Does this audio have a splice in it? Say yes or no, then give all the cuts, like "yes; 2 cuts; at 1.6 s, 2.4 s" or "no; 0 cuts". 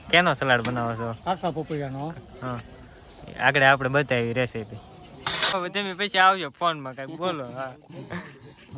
yes; 1 cut; at 5.5 s